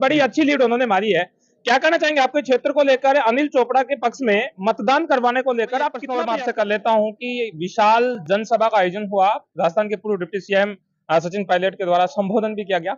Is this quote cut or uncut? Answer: cut